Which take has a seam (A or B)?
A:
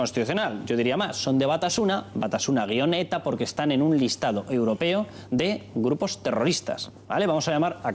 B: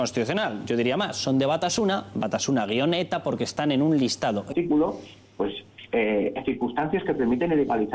A